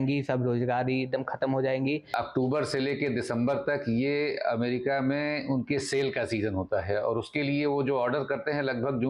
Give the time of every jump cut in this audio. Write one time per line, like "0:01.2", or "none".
0:02.1